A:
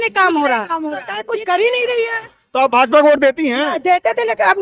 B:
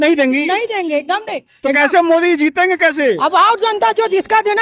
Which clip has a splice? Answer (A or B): A